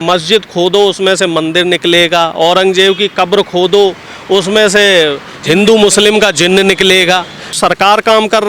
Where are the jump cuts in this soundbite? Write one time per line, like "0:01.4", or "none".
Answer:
0:07.6